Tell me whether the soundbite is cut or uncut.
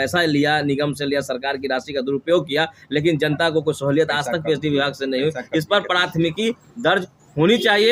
uncut